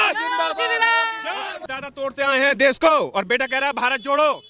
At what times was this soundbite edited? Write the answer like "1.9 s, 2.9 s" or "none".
1.7 s